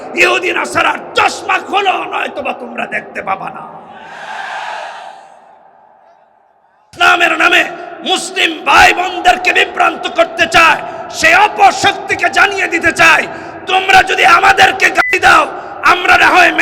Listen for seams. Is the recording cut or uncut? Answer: cut